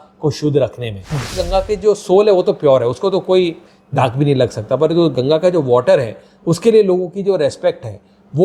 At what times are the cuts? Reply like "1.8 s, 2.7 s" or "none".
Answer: 1.3 s